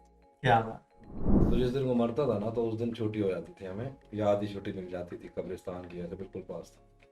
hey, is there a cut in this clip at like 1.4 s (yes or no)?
yes